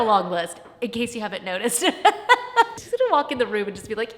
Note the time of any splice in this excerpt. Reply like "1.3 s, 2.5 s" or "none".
2.8 s